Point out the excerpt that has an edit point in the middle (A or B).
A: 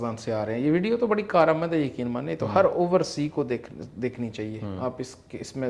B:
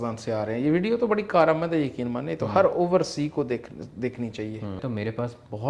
B